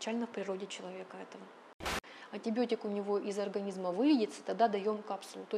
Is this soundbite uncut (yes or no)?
no